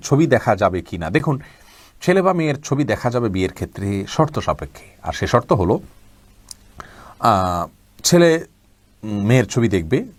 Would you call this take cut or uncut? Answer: uncut